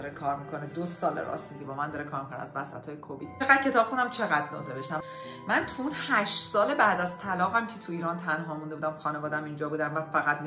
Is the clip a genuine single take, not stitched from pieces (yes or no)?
no